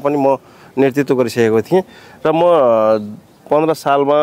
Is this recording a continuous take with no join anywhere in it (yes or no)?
yes